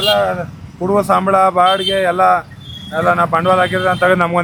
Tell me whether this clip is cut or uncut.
uncut